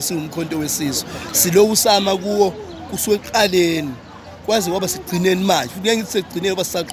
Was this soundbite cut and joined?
no; 0 cuts

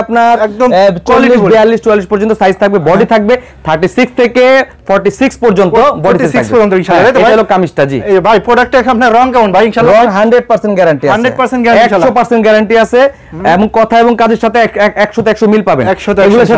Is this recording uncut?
yes; 0 cuts

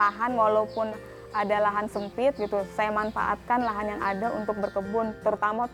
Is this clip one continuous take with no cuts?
yes; 0 cuts

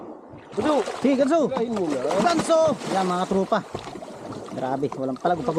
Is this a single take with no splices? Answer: yes; 0 cuts

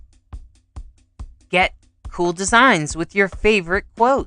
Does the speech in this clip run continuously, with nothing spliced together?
no; 1 cut; at 1.4 s

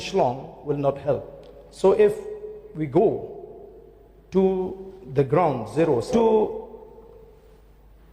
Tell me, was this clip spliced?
yes; 1 cut; at 6.1 s

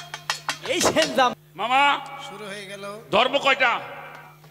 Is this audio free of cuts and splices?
no; 1 cut; at 1.3 s

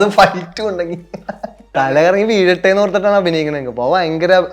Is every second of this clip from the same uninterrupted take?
no; 1 cut; at 1.7 s

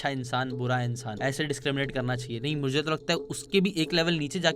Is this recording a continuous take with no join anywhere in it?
no; 1 cut; at 1.1 s

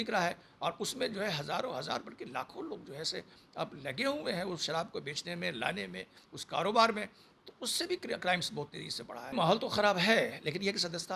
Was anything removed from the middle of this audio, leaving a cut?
yes; 1 cut; at 9.3 s

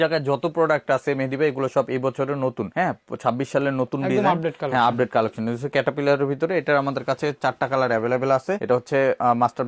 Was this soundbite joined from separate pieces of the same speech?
no; 0 cuts

